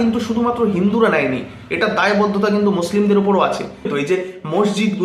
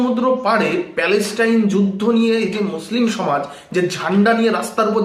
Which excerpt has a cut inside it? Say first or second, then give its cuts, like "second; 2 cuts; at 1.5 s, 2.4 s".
first; 1 cut; at 3.9 s